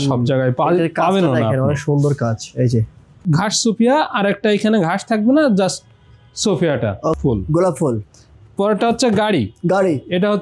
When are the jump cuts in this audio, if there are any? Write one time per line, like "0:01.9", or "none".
0:03.1
0:07.2